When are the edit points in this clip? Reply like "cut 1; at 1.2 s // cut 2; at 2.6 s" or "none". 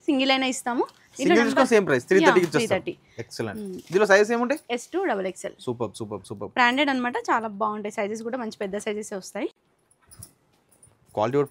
none